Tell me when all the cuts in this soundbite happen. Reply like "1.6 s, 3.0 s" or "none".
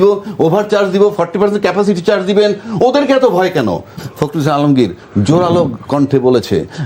4.0 s